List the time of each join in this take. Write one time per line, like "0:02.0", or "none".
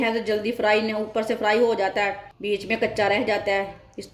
0:02.3